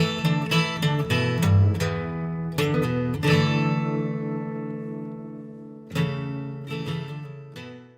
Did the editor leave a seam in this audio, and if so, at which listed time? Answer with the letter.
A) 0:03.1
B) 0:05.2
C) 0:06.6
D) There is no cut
D